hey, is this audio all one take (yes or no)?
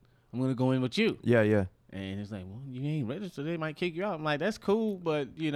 yes